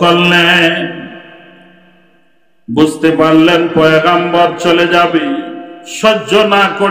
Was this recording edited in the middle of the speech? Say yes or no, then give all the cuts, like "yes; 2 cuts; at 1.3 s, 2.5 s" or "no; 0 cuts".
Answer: no; 0 cuts